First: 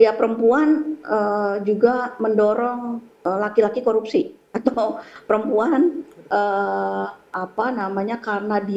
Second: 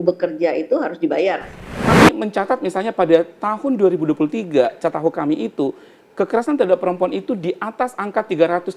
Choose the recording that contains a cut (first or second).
second